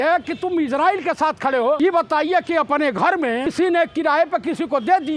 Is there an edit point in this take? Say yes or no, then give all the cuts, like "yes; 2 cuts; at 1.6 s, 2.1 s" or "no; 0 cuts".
yes; 2 cuts; at 1.8 s, 3.5 s